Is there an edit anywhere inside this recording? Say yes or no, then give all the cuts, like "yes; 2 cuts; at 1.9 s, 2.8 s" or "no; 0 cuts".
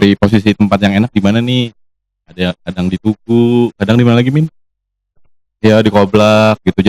no; 0 cuts